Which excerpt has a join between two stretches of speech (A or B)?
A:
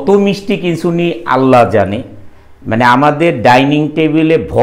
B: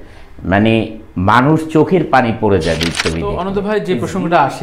B